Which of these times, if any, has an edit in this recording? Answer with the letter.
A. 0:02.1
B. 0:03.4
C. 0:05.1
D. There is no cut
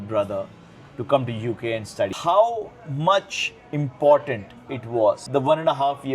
A